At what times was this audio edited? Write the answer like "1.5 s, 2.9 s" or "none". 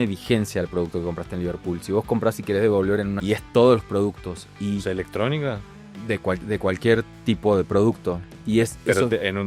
3.1 s